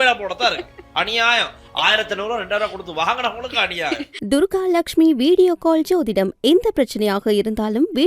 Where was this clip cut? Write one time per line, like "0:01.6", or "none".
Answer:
0:04.1